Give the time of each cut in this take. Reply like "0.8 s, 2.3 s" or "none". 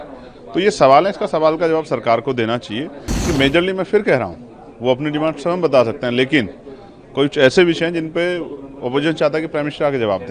3.1 s